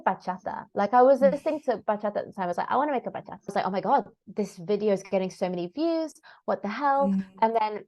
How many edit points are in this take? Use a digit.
1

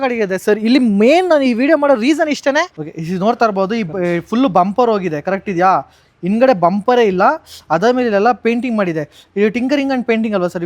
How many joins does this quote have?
1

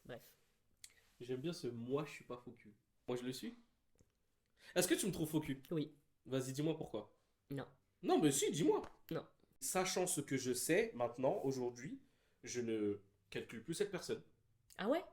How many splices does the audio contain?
1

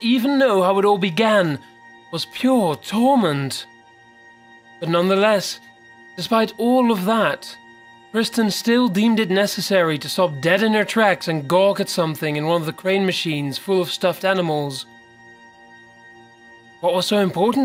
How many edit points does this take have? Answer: 0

